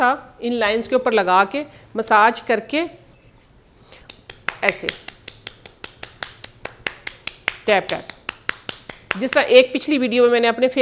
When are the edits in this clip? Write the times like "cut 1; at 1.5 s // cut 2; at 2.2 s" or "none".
none